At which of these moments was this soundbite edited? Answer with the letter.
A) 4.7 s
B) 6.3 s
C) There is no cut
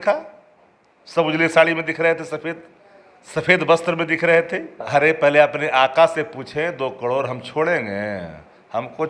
A